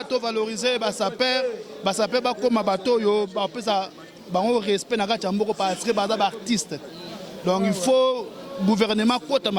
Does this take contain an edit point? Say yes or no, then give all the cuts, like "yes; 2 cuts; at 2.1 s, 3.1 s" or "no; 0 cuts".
no; 0 cuts